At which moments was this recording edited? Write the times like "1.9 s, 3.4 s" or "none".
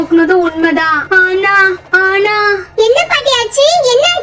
none